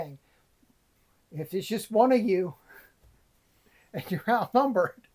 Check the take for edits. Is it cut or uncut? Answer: cut